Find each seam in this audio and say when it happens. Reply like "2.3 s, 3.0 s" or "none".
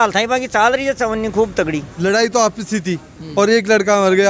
1.9 s

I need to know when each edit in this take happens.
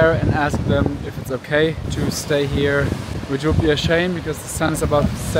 1.9 s, 3.1 s

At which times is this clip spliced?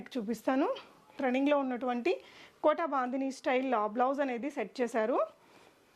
1.2 s

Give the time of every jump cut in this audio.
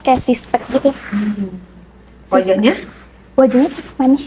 none

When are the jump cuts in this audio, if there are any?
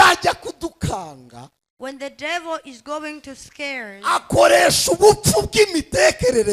none

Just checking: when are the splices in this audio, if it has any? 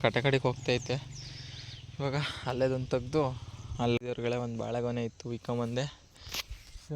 4.0 s

